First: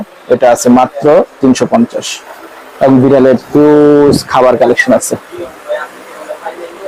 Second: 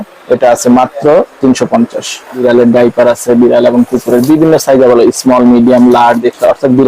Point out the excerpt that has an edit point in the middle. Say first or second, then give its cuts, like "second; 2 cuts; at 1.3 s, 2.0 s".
second; 1 cut; at 2.4 s